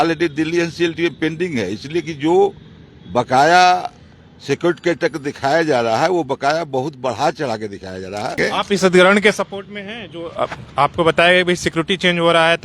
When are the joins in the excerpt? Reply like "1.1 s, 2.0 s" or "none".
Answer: 8.4 s